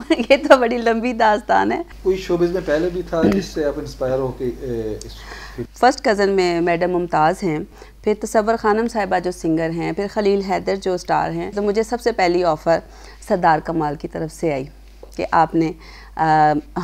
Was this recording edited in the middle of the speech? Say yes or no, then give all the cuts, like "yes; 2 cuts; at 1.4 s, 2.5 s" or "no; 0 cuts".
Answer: yes; 4 cuts; at 1.9 s, 5.6 s, 7.8 s, 11.5 s